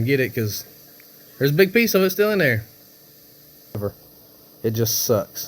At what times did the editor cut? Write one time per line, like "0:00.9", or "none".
0:03.8